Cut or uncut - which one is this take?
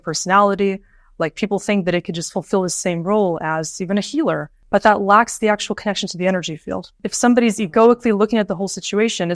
cut